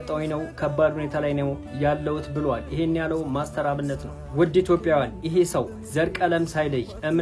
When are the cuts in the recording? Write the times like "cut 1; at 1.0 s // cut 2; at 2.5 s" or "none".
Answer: none